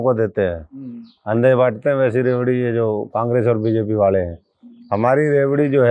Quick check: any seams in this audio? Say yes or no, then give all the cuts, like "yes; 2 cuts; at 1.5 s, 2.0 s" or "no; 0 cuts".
no; 0 cuts